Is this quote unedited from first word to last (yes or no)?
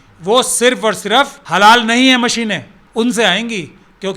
no